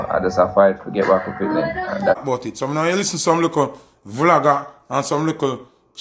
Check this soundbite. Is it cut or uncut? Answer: cut